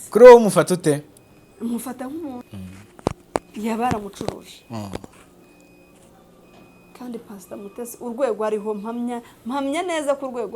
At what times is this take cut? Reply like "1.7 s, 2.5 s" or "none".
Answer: 2.5 s